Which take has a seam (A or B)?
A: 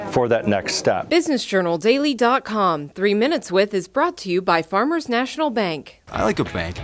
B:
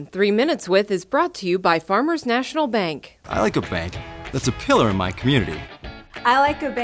A